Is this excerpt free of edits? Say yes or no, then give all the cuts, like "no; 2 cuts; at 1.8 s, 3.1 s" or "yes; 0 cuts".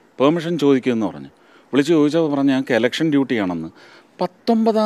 yes; 0 cuts